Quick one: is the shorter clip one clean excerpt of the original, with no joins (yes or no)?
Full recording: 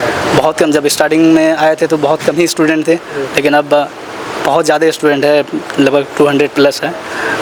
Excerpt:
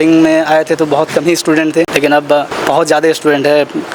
no